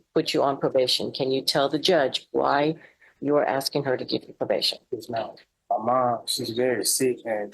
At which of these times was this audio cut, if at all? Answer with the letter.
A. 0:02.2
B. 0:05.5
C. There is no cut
B